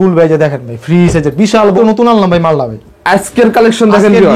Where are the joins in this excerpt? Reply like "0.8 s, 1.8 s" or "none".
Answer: 1.8 s